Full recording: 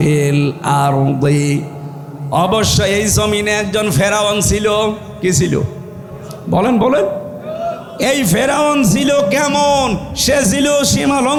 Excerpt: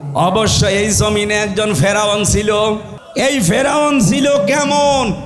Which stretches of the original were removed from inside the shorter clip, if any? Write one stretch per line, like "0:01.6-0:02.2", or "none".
0:05.1-0:07.8